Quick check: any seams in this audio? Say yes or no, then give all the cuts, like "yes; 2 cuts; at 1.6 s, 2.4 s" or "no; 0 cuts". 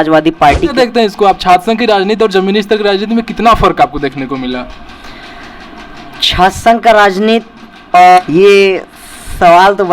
yes; 2 cuts; at 0.7 s, 8.2 s